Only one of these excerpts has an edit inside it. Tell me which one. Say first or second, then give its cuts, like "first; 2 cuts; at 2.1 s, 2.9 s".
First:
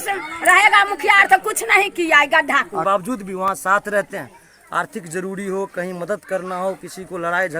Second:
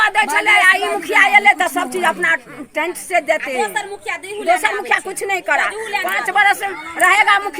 first; 1 cut; at 2.8 s